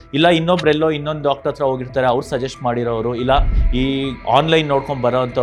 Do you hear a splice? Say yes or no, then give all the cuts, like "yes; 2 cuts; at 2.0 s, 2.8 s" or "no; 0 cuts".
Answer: no; 0 cuts